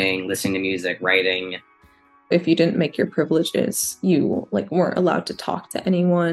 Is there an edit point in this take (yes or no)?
yes